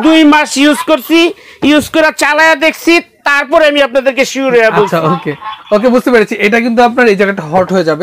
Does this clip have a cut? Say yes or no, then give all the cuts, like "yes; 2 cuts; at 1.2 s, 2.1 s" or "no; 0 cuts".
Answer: no; 0 cuts